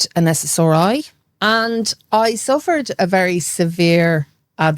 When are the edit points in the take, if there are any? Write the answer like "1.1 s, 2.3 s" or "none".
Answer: 1.2 s